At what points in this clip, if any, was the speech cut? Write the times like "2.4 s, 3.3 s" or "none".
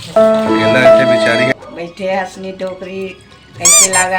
1.5 s